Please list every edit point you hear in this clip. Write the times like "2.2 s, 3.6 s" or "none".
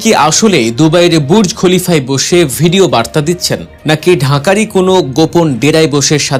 none